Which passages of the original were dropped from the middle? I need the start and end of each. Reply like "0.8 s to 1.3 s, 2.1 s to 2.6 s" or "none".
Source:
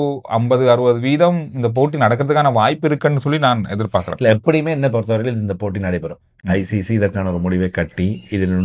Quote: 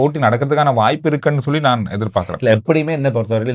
none